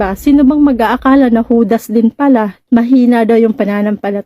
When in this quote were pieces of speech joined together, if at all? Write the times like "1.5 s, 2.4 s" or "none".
2.6 s